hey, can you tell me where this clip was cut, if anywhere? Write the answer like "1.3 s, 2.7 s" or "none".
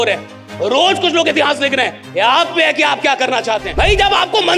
3.7 s